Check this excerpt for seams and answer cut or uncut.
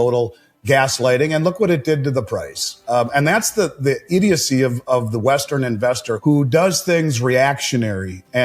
cut